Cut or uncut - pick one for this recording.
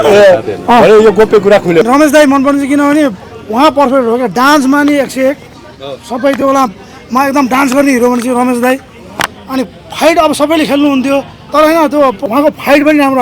cut